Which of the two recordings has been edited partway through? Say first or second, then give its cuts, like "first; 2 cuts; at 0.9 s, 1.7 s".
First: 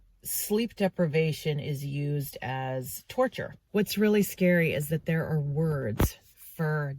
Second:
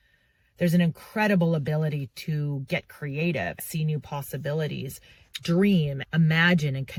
first; 1 cut; at 3.6 s